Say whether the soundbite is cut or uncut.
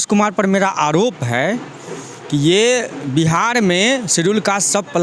uncut